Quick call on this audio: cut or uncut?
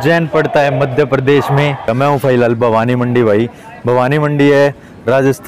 cut